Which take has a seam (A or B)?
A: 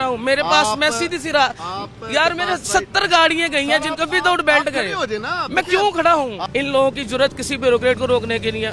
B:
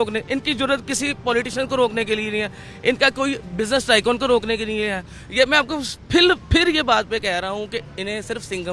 A